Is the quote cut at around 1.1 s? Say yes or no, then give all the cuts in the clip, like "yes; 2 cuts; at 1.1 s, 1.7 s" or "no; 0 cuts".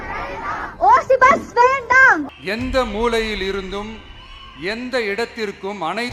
no; 1 cut; at 2.3 s